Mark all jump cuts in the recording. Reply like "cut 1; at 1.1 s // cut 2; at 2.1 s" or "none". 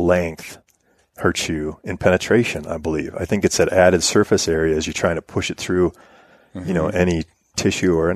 none